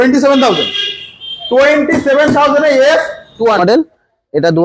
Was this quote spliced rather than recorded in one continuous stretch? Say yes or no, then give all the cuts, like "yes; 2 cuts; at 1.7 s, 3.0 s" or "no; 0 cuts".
yes; 1 cut; at 3.6 s